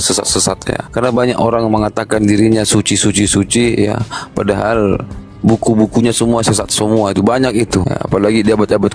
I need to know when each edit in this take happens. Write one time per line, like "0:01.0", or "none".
0:00.9
0:07.9